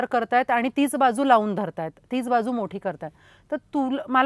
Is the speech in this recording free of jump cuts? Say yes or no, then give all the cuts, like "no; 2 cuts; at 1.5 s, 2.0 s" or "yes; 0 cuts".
yes; 0 cuts